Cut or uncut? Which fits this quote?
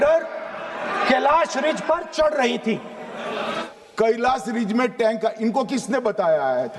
cut